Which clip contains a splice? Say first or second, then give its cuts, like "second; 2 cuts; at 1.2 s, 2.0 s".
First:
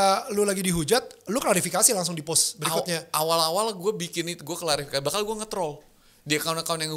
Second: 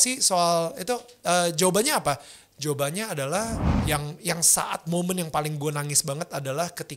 second; 1 cut; at 3.7 s